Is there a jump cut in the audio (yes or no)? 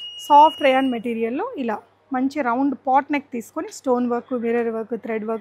no